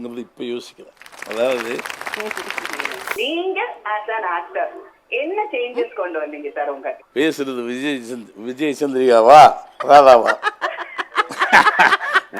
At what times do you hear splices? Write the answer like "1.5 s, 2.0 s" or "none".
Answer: 3.2 s